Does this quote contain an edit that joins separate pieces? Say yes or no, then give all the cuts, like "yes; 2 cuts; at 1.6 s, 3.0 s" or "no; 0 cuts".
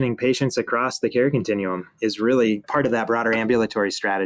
no; 0 cuts